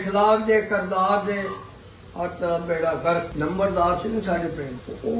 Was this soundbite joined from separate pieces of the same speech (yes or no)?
yes